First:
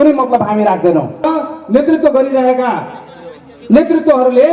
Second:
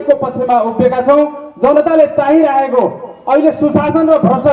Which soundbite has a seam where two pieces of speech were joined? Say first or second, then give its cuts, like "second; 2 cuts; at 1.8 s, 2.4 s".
first; 1 cut; at 1.3 s